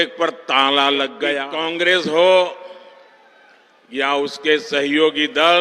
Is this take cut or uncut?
cut